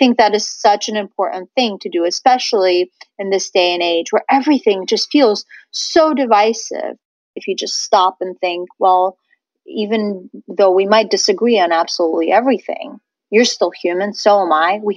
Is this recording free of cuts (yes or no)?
no